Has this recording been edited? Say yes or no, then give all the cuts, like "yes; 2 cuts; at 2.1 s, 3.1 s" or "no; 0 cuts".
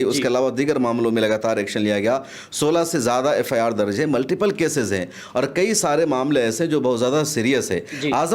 no; 0 cuts